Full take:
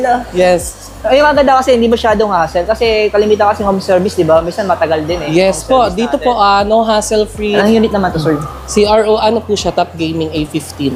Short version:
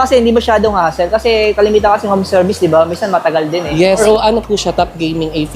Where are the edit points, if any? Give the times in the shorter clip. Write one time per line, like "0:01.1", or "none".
0:04.0